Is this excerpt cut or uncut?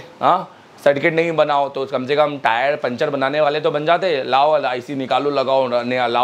uncut